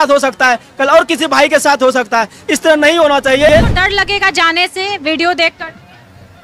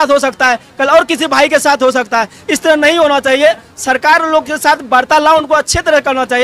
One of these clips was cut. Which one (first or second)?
first